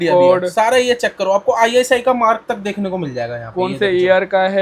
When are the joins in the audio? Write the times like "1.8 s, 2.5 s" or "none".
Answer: none